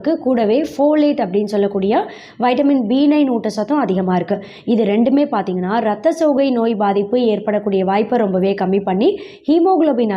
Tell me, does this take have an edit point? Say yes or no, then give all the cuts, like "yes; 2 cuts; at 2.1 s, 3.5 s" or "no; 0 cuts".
no; 0 cuts